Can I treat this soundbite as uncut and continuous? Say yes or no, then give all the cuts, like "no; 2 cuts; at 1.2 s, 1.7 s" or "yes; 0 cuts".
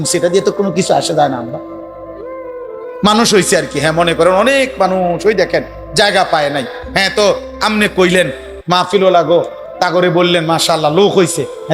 yes; 0 cuts